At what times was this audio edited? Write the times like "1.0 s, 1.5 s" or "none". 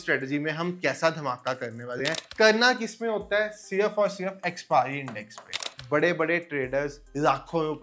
2.2 s, 5.7 s